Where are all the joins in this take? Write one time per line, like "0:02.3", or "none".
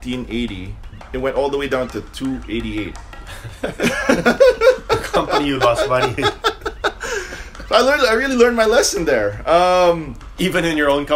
0:01.0

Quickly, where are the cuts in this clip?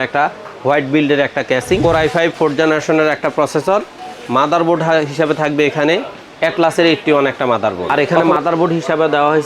0:01.8
0:07.9

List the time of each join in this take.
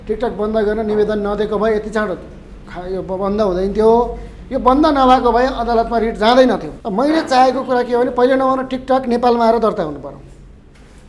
0:06.7

